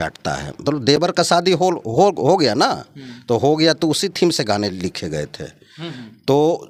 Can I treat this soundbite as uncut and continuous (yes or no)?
yes